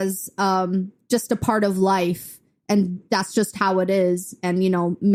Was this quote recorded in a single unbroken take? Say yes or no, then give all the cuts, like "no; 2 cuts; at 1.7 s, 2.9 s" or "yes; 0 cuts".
yes; 0 cuts